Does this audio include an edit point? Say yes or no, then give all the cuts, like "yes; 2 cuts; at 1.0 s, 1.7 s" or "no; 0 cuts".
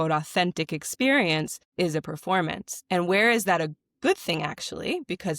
yes; 1 cut; at 1.6 s